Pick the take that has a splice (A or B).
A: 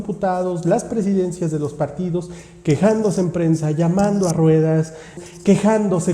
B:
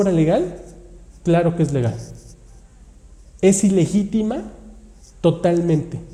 A